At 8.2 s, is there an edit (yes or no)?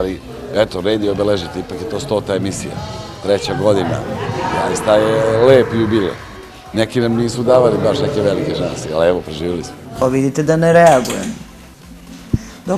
no